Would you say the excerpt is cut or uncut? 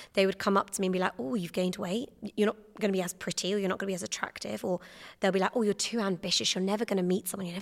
cut